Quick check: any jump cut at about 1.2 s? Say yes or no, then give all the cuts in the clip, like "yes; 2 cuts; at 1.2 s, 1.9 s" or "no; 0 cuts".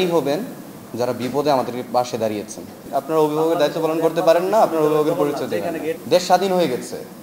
no; 2 cuts; at 2.8 s, 5.9 s